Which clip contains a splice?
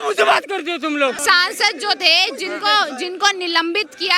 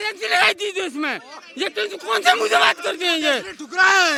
first; 1 cut; at 1.2 s

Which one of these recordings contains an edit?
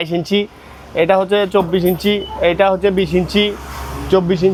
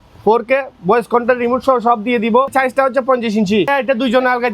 second; 2 cuts; at 2.5 s, 3.7 s

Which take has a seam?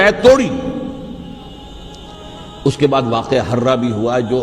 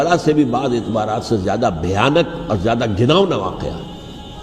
first; 1 cut; at 1.5 s

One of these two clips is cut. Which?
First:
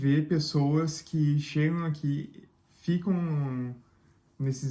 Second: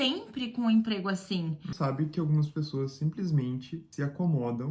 second; 2 cuts; at 1.7 s, 3.8 s

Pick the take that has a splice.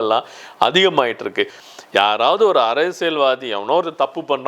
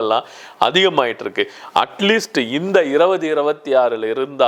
first; 1 cut; at 1.6 s

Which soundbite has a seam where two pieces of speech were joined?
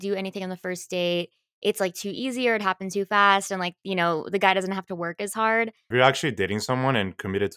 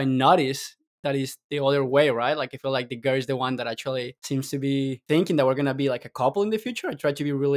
first; 1 cut; at 5.9 s

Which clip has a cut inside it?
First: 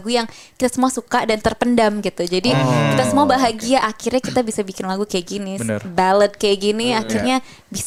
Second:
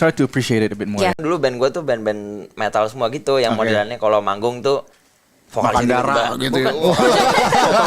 second; 1 cut; at 1.2 s

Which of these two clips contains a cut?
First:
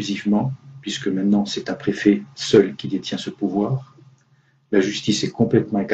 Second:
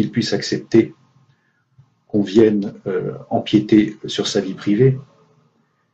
second; 1 cut; at 5.0 s

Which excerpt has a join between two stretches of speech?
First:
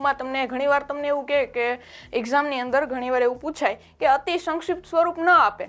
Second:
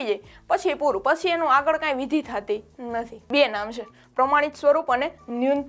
second; 1 cut; at 3.2 s

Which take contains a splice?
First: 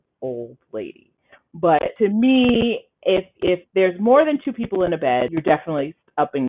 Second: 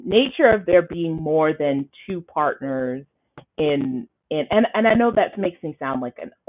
first; 2 cuts; at 1.9 s, 5.3 s

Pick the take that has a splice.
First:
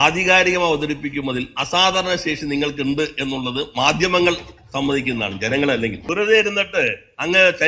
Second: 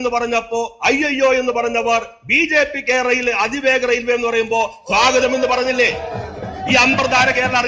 first; 1 cut; at 6.0 s

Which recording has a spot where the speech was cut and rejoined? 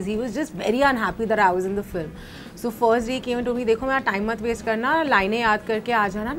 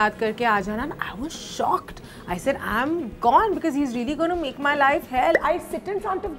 second; 1 cut; at 5.4 s

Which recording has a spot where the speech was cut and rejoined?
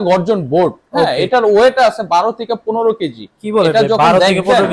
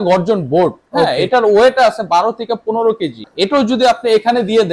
second; 1 cut; at 3.3 s

